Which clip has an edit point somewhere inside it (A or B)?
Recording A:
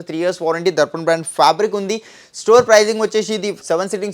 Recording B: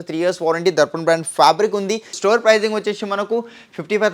B